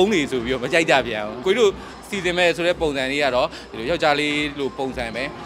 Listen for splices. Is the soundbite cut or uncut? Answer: cut